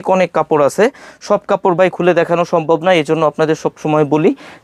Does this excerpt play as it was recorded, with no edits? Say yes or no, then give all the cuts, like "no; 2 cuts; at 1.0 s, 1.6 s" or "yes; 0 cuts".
yes; 0 cuts